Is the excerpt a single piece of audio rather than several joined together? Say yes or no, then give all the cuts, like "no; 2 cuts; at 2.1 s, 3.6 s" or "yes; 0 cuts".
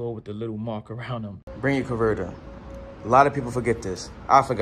no; 1 cut; at 1.4 s